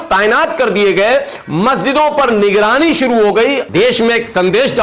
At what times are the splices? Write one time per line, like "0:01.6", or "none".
0:03.6

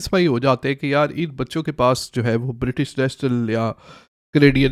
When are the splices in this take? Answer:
none

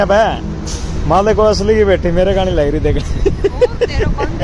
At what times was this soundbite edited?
none

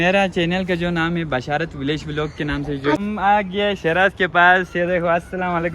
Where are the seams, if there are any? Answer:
0:03.0

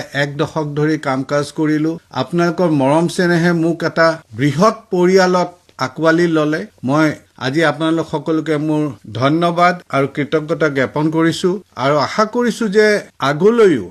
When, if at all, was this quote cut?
0:07.3

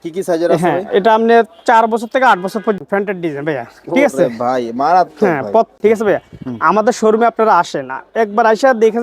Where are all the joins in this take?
0:02.8
0:05.7

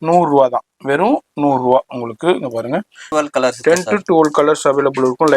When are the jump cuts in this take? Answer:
0:03.0

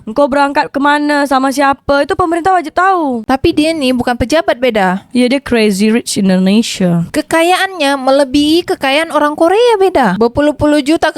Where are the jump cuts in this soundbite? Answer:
0:03.2

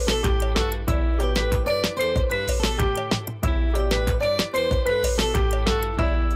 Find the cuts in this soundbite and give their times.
none

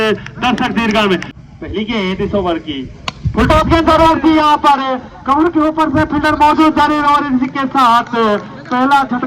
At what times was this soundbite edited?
0:01.3

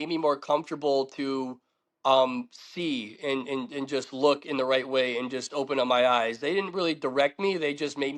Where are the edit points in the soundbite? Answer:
none

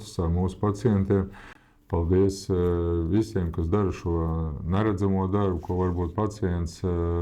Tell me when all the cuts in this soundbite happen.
none

